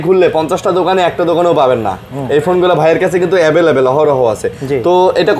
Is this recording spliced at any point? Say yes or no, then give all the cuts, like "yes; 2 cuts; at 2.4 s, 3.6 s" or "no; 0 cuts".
no; 0 cuts